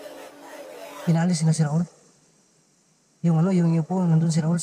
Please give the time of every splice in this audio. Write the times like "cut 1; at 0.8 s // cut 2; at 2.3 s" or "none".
cut 1; at 1.0 s

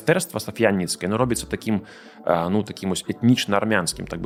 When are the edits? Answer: none

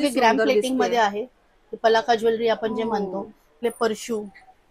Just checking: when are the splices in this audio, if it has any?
cut 1; at 3.6 s

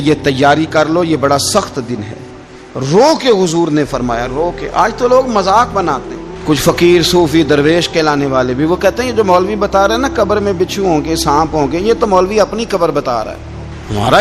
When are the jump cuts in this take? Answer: none

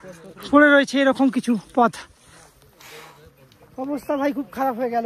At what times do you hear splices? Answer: none

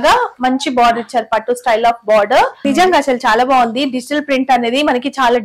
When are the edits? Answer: cut 1; at 2.6 s

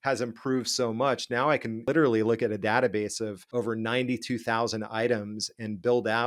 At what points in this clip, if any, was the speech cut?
cut 1; at 1.8 s // cut 2; at 3.4 s

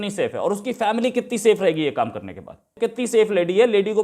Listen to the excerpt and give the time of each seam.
cut 1; at 2.7 s

